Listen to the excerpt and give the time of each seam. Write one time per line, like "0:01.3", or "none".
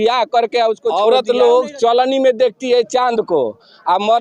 0:00.9

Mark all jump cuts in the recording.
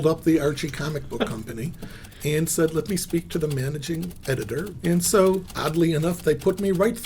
0:04.7

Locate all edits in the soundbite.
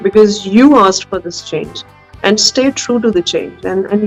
none

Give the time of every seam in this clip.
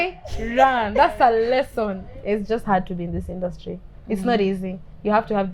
0:02.1

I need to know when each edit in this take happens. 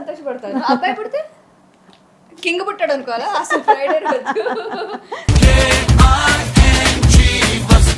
none

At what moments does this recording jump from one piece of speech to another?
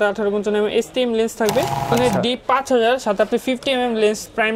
0:01.9

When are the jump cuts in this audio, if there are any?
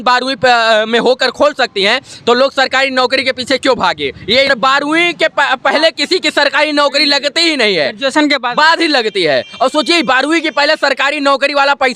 0:04.5

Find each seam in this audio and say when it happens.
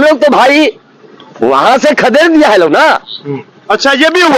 none

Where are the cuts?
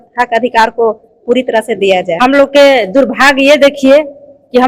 0:02.1

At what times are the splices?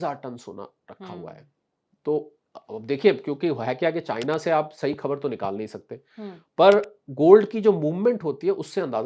none

